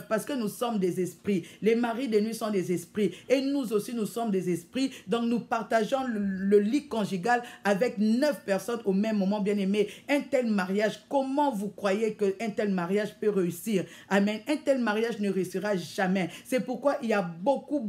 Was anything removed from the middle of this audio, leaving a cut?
no; 0 cuts

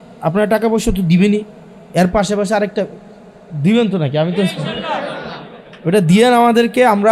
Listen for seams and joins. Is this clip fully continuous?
yes; 0 cuts

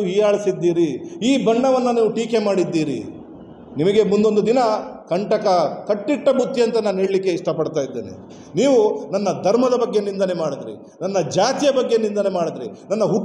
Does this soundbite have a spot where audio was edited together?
no; 0 cuts

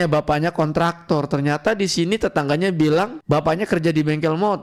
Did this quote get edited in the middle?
no; 0 cuts

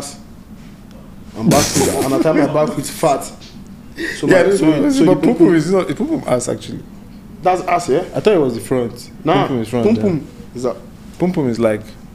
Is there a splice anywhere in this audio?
no; 0 cuts

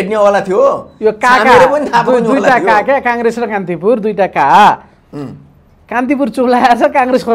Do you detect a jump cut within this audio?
no; 0 cuts

